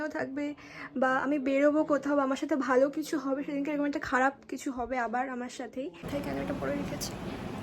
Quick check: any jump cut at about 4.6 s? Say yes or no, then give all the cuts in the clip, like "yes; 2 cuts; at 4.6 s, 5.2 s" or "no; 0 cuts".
no; 1 cut; at 6.1 s